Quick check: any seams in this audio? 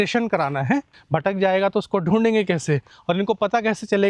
yes; 1 cut; at 1.0 s

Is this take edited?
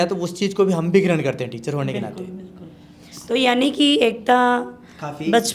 no; 0 cuts

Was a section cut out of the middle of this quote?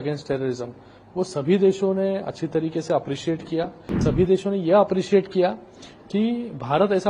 yes; 1 cut; at 4.0 s

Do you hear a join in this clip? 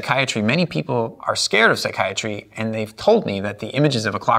yes; 1 cut; at 1.2 s

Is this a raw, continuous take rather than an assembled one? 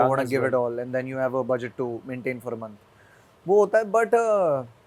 yes; 0 cuts

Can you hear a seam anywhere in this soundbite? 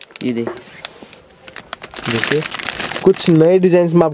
no; 0 cuts

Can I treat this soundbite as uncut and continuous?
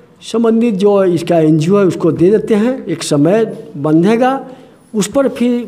yes; 0 cuts

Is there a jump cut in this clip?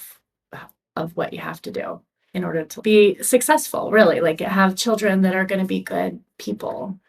yes; 1 cut; at 2.8 s

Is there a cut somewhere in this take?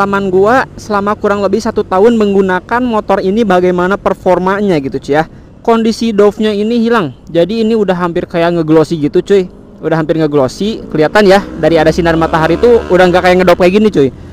yes; 1 cut; at 5.4 s

